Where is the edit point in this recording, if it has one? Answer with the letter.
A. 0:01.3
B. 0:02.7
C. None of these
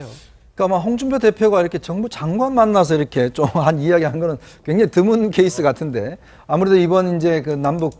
C